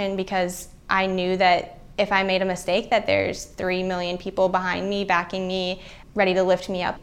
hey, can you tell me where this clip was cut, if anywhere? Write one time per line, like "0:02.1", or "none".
0:01.8

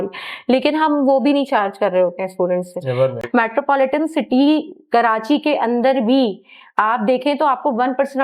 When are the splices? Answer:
0:03.1

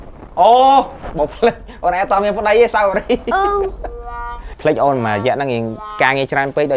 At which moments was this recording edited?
none

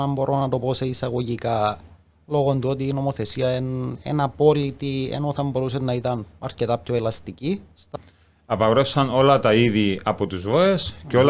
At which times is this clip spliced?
0:07.9

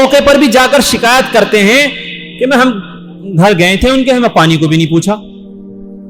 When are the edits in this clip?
none

